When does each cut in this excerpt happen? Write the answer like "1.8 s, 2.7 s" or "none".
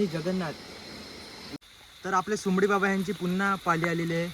1.6 s